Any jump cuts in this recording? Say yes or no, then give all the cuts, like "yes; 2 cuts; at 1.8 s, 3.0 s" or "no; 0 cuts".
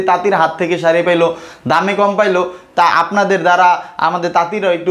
no; 0 cuts